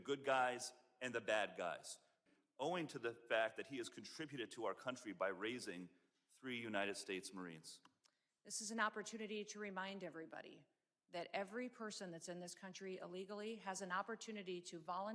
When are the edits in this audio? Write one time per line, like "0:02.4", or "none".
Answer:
0:02.2

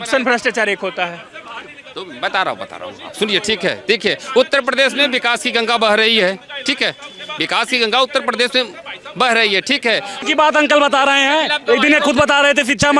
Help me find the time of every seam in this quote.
0:10.2

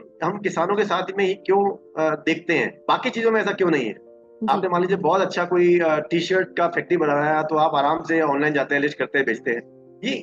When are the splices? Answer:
0:02.7

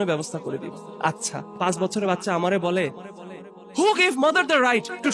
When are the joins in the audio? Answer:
0:01.6

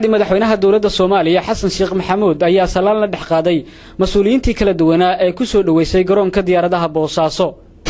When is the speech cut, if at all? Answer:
0:05.2

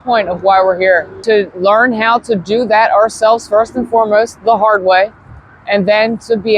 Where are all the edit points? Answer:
0:01.1

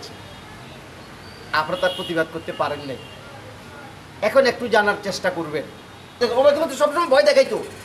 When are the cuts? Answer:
0:06.2

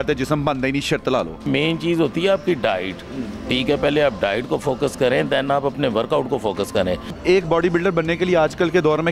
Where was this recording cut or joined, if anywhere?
none

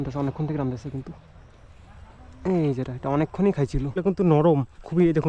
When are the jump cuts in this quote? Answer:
0:04.0

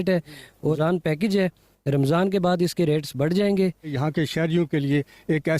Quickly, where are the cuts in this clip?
0:00.8
0:03.9

